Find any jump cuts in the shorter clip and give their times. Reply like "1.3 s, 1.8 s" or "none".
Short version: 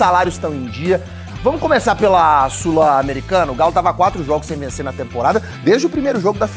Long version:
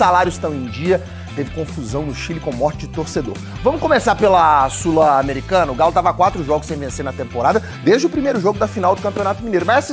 1.2 s